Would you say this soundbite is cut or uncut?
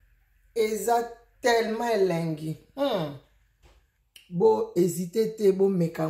uncut